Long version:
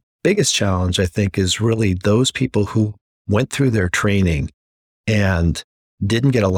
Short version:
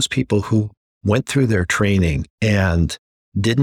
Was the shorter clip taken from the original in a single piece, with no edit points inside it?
no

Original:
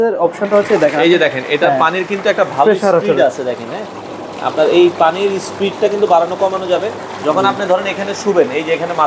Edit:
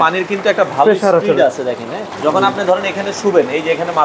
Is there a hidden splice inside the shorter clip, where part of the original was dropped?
yes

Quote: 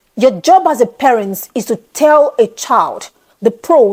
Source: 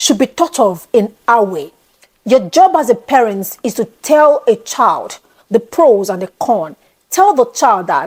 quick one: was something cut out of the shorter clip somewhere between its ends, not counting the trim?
no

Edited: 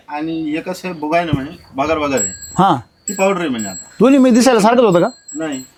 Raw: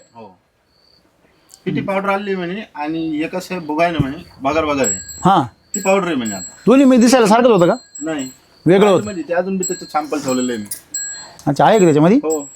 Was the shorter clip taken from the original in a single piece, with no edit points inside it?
yes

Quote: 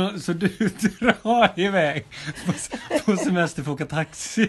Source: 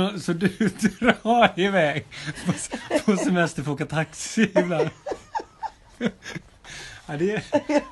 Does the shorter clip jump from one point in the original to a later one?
no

